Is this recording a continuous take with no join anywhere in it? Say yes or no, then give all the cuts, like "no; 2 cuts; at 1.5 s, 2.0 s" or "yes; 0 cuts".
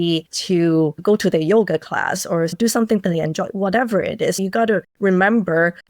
no; 3 cuts; at 1.0 s, 2.6 s, 4.4 s